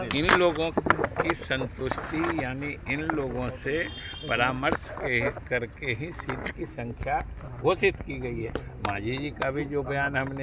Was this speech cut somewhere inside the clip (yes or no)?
no